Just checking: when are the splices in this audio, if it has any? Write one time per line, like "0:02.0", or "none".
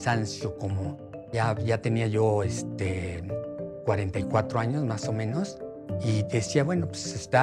none